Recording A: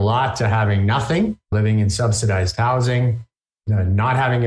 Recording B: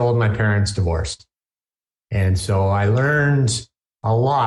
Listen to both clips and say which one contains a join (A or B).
A